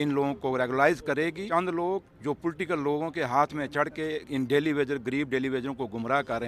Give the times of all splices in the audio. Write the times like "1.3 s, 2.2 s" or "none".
1.5 s